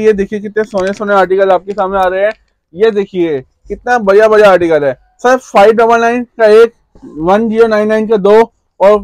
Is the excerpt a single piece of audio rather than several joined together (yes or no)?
yes